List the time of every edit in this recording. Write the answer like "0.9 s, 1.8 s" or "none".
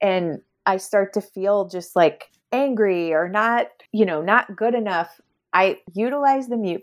2.3 s, 3.8 s, 5.9 s